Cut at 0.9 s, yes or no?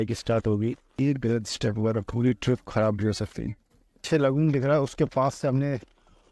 yes